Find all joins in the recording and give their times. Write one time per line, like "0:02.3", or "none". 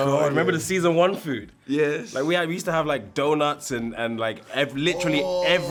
none